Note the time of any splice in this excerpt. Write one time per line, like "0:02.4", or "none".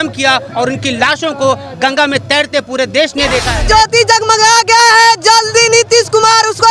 0:03.5